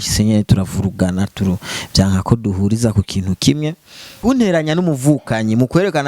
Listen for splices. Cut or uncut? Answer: cut